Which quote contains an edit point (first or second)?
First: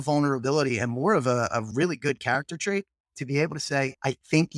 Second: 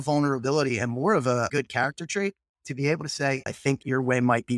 second